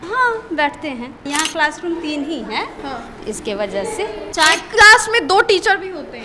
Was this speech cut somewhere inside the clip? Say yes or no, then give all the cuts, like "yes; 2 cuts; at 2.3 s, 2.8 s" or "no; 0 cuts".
yes; 2 cuts; at 1.3 s, 4.2 s